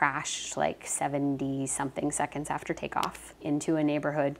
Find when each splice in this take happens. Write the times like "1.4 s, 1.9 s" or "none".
3.4 s